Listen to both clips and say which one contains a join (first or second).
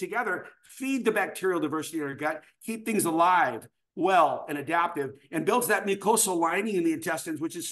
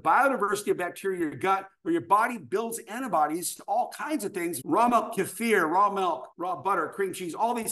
second